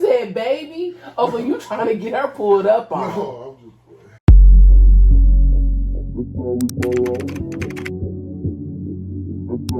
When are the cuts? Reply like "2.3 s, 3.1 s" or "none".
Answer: 4.1 s

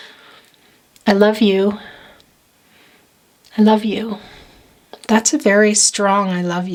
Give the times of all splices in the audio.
none

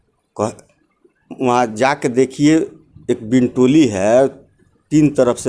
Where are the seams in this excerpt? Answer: none

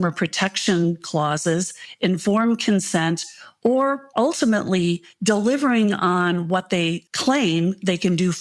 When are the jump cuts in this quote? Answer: 7.1 s

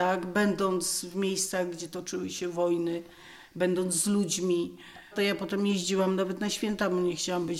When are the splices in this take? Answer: 5.1 s

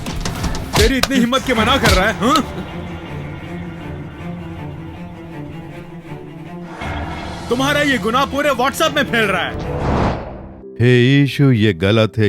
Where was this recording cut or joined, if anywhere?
10.1 s

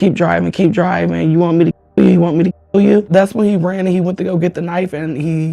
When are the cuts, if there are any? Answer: 3.1 s

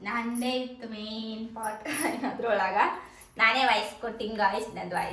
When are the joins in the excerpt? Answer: none

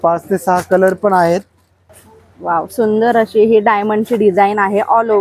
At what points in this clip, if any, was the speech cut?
1.9 s

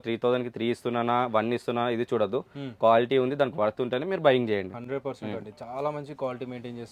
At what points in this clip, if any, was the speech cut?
none

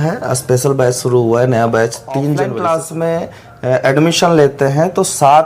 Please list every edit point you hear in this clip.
2.5 s

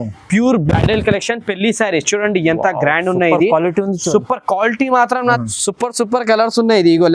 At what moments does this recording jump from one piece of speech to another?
5.4 s

